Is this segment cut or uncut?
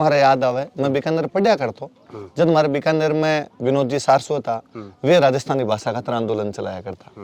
uncut